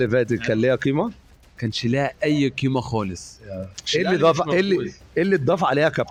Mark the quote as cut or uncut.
uncut